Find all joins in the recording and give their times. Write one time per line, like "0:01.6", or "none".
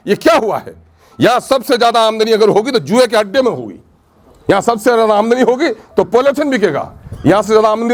none